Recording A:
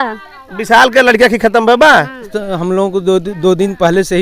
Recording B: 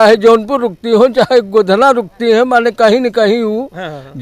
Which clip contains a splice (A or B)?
A